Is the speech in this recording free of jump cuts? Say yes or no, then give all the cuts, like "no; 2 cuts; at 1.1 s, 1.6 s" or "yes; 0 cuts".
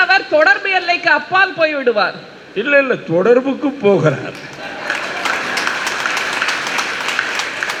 yes; 0 cuts